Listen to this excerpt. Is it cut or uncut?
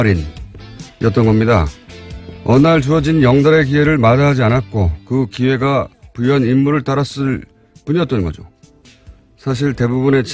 cut